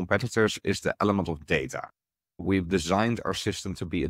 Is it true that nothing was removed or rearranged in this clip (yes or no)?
no